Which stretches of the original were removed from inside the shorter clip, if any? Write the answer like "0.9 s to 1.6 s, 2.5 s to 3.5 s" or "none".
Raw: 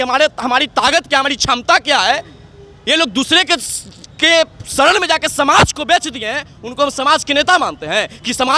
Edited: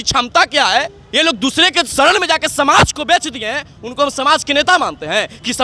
2.3 s to 2.7 s, 3.6 s to 4.7 s